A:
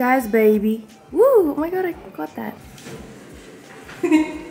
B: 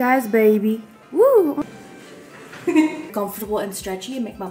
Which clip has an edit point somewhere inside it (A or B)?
B